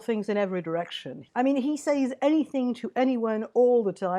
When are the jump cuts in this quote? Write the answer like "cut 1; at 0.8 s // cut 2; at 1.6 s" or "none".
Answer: cut 1; at 1.2 s